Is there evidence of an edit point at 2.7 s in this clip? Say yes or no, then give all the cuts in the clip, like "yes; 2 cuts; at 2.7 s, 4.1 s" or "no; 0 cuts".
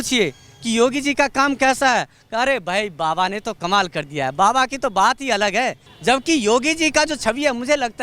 no; 1 cut; at 5.8 s